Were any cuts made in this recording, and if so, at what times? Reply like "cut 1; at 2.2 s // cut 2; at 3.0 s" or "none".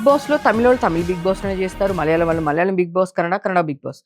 none

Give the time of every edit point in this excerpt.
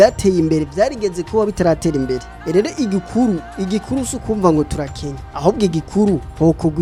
none

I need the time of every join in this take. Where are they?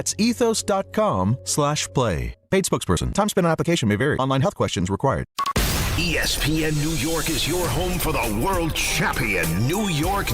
cut 1; at 5.3 s

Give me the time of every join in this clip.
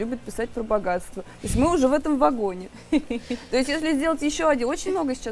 none

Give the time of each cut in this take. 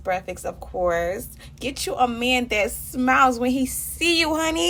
none

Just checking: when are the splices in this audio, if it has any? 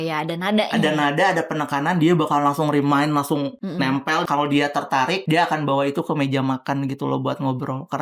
cut 1; at 4.0 s // cut 2; at 5.2 s

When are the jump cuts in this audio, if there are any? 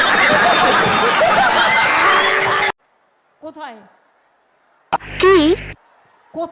cut 1; at 2.6 s

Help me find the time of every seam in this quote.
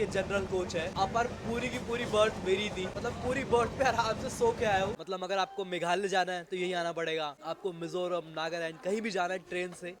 cut 1; at 2.9 s // cut 2; at 4.9 s // cut 3; at 7.4 s

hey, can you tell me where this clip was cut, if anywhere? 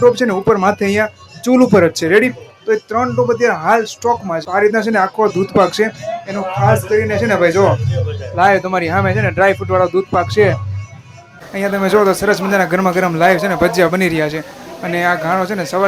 cut 1; at 4.4 s // cut 2; at 11.3 s

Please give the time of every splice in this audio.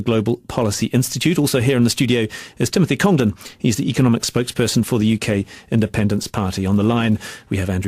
cut 1; at 3.5 s

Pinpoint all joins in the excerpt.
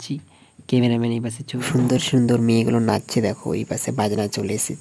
cut 1; at 1.6 s

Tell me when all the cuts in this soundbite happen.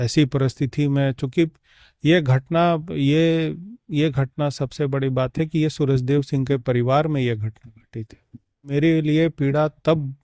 cut 1; at 8.7 s

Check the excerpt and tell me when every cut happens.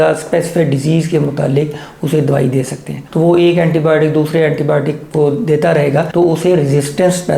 cut 1; at 3.0 s

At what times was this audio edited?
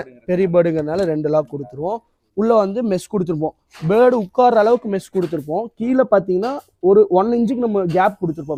none

